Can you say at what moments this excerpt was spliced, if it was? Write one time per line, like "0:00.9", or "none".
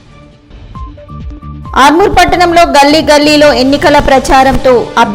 0:01.4